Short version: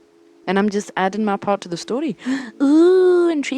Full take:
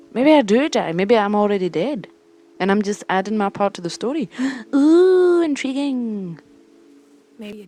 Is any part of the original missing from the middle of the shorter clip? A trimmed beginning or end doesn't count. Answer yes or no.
no